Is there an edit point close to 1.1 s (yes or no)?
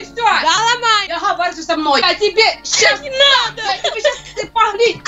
yes